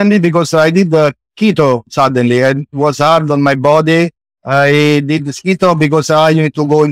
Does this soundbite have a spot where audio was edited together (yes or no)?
no